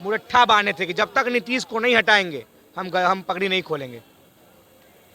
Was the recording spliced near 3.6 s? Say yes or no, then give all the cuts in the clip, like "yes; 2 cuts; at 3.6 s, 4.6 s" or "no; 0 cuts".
no; 0 cuts